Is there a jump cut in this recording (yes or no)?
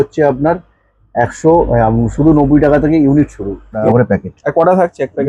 yes